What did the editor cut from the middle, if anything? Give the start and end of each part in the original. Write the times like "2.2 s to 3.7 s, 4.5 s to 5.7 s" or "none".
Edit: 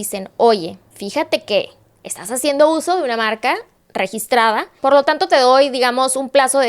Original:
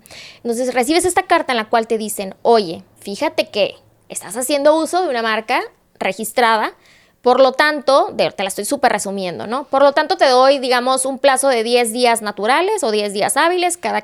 6.8 s to 9.6 s